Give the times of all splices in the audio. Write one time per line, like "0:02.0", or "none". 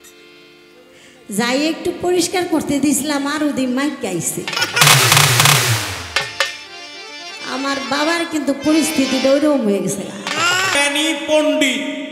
0:10.8